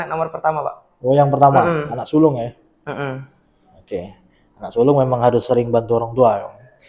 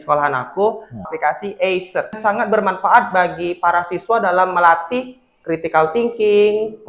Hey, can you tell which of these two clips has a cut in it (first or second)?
second